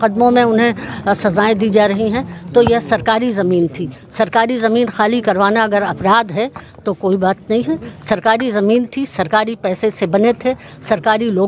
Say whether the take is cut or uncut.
uncut